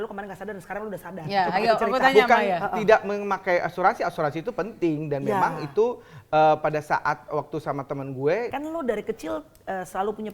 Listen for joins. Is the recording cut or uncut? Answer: cut